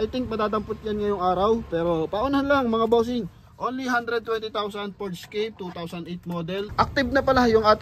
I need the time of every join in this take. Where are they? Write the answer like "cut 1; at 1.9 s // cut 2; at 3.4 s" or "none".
cut 1; at 6.6 s